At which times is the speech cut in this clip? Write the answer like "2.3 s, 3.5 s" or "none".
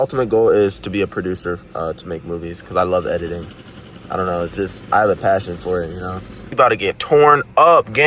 6.4 s